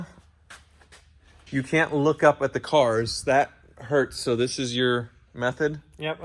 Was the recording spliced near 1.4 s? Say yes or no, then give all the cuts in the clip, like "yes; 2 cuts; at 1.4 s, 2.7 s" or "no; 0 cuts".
yes; 1 cut; at 1.4 s